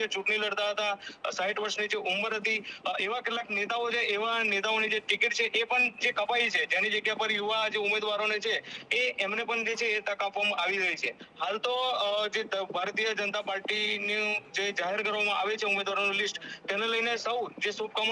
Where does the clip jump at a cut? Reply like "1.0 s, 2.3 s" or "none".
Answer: none